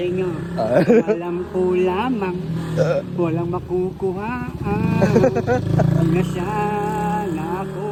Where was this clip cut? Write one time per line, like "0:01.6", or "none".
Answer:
none